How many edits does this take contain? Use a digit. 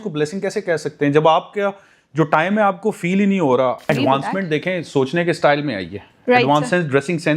1